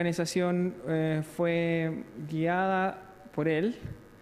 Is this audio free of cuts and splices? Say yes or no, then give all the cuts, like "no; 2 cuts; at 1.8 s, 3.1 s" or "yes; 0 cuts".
no; 1 cut; at 2.2 s